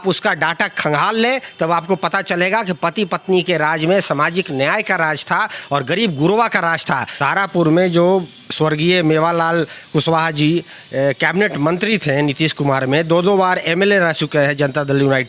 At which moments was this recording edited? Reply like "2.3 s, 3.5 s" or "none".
7.1 s